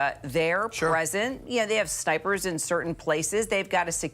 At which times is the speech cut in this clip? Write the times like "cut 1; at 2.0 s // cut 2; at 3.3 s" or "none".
none